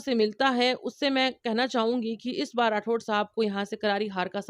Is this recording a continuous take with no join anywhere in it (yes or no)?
yes